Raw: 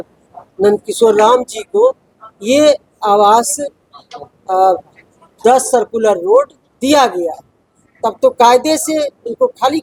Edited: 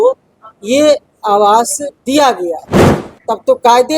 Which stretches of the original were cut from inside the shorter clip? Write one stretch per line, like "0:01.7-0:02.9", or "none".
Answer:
0:03.7-0:06.6